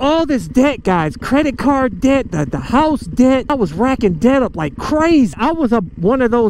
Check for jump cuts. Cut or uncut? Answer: cut